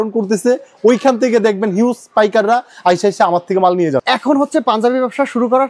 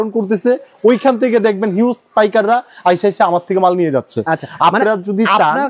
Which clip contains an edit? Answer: first; 1 cut; at 4.0 s

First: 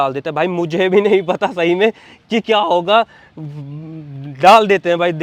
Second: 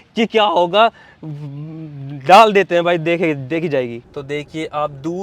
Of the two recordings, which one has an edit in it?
second; 1 cut; at 4.0 s

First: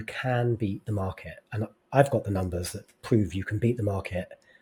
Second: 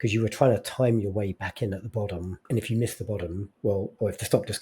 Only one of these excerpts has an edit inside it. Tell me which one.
second; 2 cuts; at 2.3 s, 3.5 s

